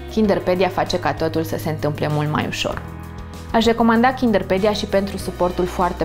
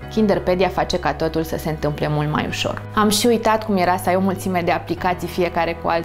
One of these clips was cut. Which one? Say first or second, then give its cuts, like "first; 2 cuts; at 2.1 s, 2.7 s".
second; 1 cut; at 2.8 s